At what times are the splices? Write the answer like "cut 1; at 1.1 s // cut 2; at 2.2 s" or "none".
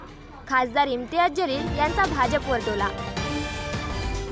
cut 1; at 2.9 s